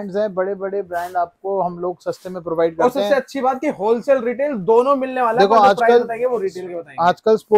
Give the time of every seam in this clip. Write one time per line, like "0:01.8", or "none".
none